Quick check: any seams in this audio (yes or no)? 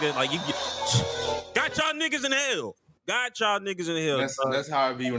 no